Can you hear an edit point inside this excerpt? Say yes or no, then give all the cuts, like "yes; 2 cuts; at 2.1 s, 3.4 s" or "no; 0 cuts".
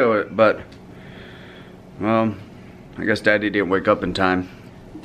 no; 0 cuts